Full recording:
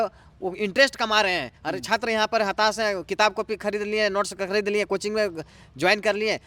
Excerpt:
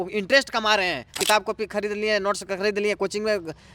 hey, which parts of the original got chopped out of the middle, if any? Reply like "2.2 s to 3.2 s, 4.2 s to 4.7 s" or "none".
1.6 s to 3.0 s